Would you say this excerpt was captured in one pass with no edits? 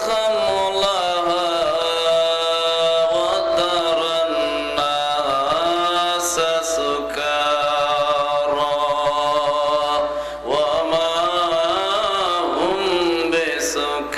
yes; 0 cuts

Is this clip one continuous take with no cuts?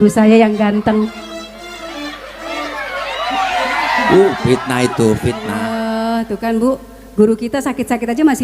no; 1 cut; at 5.9 s

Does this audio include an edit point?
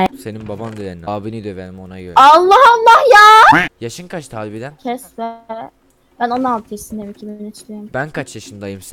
yes; 1 cut; at 3.6 s

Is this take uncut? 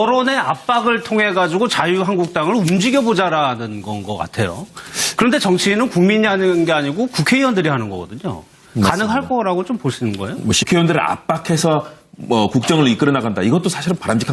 yes; 0 cuts

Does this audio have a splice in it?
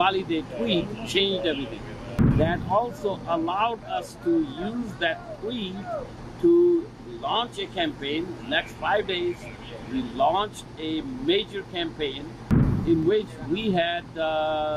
yes; 1 cut; at 2.1 s

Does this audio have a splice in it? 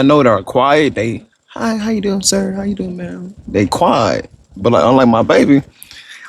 no; 0 cuts

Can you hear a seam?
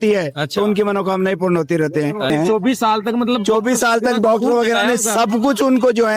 yes; 1 cut; at 2.3 s

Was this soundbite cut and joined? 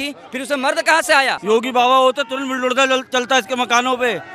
yes; 1 cut; at 1.4 s

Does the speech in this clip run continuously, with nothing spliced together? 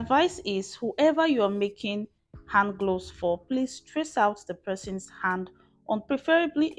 yes; 0 cuts

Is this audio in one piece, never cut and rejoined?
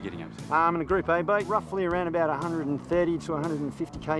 no; 1 cut; at 1.5 s

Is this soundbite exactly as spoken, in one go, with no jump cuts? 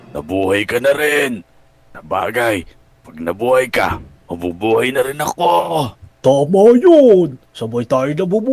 yes; 0 cuts

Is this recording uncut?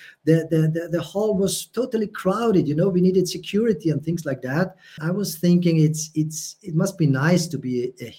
no; 1 cut; at 5.0 s

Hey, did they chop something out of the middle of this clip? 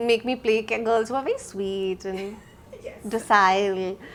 no; 0 cuts

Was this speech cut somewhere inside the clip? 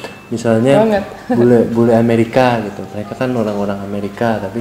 no; 0 cuts

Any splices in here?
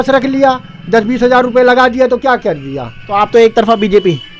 no; 0 cuts

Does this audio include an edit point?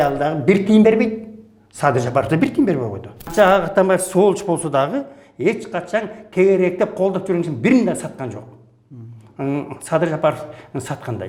yes; 1 cut; at 3.3 s

